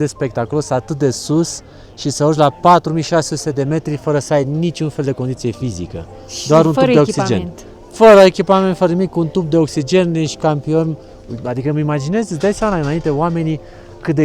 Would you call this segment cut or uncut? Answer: uncut